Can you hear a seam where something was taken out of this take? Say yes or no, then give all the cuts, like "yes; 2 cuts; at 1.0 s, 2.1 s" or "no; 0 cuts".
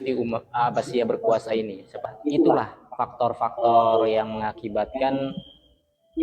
yes; 1 cut; at 2.1 s